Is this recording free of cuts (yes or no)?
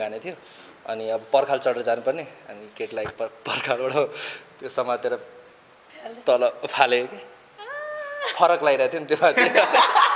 yes